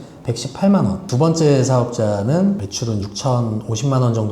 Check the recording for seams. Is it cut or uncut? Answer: cut